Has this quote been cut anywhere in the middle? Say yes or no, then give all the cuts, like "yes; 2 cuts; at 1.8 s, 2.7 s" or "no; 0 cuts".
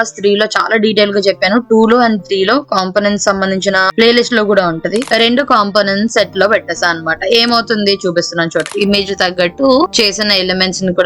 yes; 2 cuts; at 5.1 s, 8.7 s